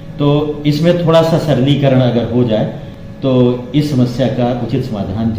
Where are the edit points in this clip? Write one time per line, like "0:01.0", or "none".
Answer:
none